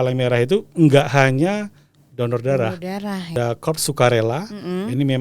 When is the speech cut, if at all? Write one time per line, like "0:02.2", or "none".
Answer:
0:03.3